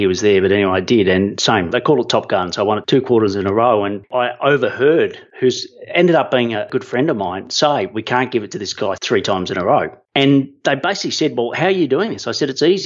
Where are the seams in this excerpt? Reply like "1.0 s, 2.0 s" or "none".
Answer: 1.7 s, 2.8 s, 4.0 s, 5.2 s, 6.6 s, 10.0 s